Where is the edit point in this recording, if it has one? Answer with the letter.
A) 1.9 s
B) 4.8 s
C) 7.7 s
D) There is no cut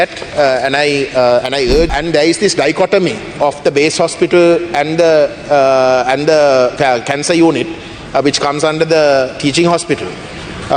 A